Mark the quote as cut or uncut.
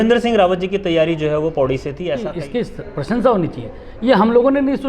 cut